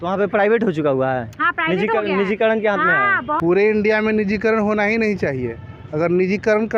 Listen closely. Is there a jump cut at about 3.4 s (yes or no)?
yes